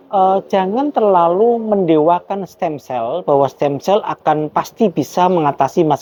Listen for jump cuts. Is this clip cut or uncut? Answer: uncut